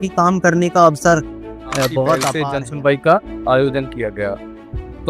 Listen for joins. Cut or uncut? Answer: cut